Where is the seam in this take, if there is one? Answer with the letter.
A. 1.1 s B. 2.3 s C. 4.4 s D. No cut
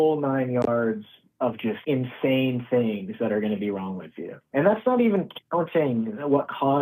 C